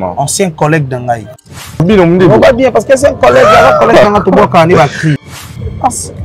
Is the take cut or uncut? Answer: cut